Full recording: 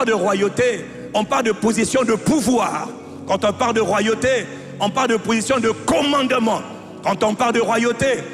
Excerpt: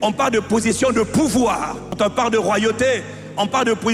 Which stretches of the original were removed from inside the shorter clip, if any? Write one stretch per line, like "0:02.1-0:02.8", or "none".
0:03.0-0:03.3